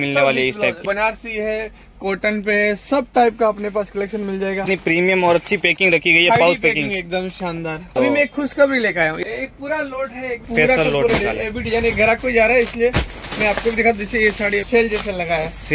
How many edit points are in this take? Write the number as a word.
six